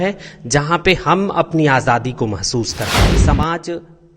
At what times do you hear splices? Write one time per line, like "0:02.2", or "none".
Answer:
0:03.0